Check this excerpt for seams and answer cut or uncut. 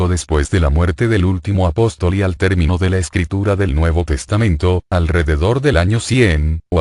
uncut